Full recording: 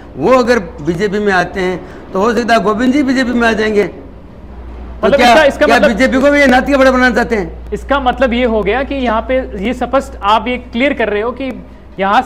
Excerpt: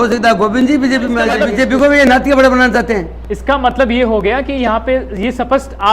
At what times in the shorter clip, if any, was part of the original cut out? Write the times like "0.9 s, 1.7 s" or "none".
1.3 s